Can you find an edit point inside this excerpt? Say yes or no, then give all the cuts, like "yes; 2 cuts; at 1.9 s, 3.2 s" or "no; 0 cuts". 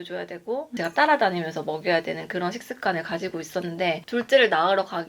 yes; 1 cut; at 4.0 s